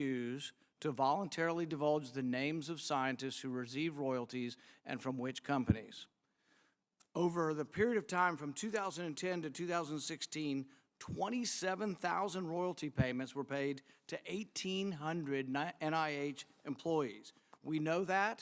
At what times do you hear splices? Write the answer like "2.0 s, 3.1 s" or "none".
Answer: none